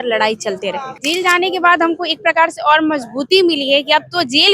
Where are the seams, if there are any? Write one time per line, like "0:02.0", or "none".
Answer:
0:01.0